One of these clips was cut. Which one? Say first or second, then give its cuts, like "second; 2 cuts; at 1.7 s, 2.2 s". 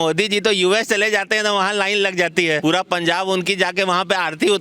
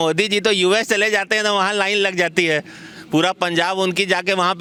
first; 1 cut; at 2.6 s